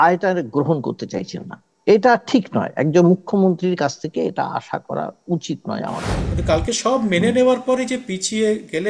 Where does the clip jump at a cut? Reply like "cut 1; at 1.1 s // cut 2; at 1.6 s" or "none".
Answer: cut 1; at 6.2 s